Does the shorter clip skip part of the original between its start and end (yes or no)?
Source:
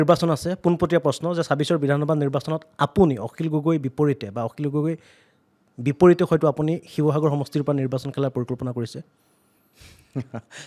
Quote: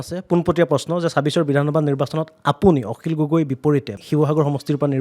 yes